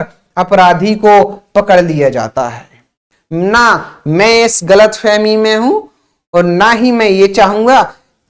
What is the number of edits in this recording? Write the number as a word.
one